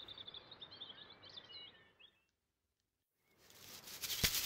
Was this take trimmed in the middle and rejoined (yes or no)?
no